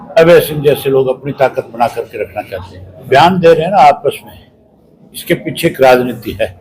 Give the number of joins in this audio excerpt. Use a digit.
1